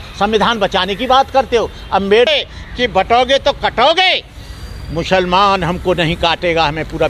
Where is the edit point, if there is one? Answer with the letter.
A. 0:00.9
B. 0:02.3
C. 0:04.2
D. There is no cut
B